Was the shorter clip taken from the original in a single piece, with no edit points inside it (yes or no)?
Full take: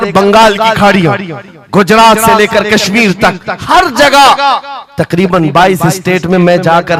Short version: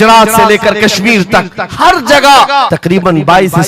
no